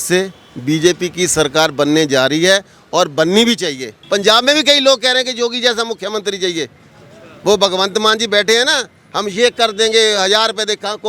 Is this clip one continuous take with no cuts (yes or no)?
no